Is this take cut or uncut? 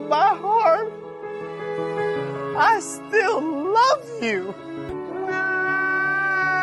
cut